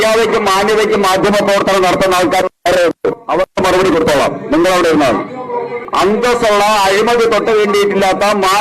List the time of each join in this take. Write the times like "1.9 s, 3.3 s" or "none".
5.8 s